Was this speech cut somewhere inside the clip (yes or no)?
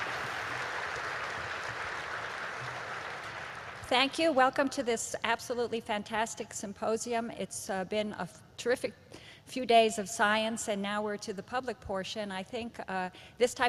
no